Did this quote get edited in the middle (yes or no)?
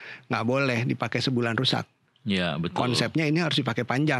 no